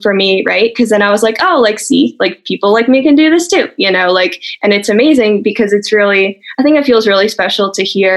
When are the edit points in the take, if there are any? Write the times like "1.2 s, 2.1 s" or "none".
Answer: none